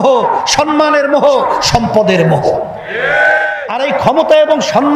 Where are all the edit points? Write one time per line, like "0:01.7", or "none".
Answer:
0:03.6